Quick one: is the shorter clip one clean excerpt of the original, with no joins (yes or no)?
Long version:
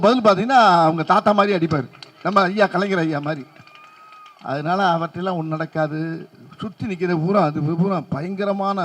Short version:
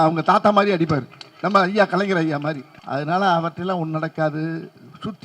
no